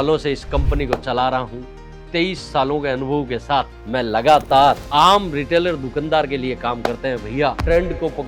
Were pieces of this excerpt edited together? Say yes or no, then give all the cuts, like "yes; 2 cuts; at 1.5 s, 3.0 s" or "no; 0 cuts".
no; 0 cuts